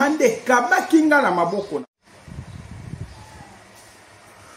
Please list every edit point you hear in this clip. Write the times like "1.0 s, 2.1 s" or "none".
1.8 s